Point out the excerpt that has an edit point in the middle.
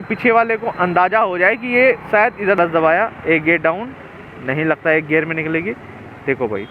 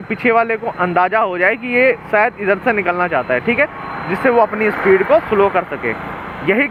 first; 1 cut; at 2.6 s

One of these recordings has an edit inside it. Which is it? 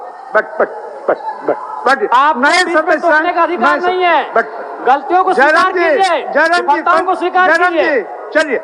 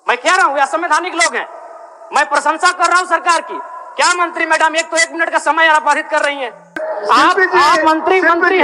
second; 1 cut; at 6.8 s

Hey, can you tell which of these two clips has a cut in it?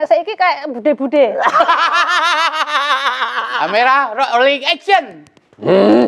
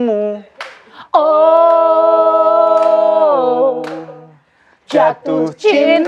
first; 1 cut; at 3.5 s

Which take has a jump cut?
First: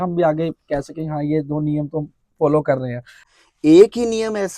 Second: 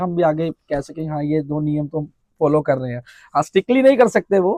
first; 1 cut; at 3.2 s

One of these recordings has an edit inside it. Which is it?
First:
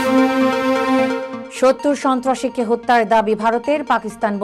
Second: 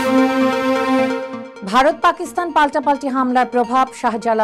second; 1 cut; at 1.4 s

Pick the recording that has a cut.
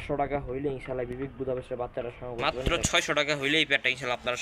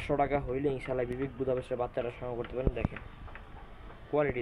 first; 1 cut; at 2.4 s

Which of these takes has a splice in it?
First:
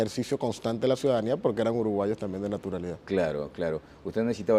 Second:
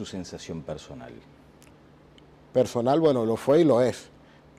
first; 1 cut; at 1.7 s

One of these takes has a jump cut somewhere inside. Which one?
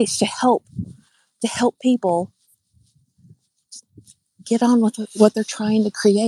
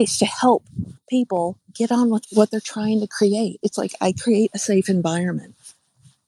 second; 2 cuts; at 1.0 s, 2.0 s

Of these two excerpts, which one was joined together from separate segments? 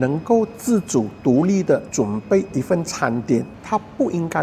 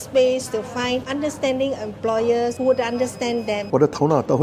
second; 3 cuts; at 1.1 s, 2.6 s, 3.6 s

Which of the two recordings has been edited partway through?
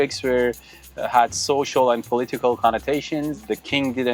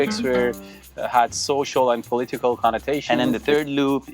second; 1 cut; at 3.0 s

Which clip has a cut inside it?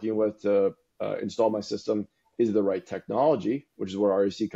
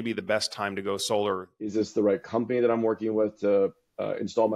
second; 1 cut; at 1.7 s

